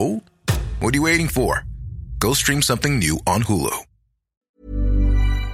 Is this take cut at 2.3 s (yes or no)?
no